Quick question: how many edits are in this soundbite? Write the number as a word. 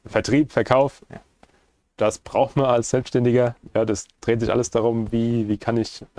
zero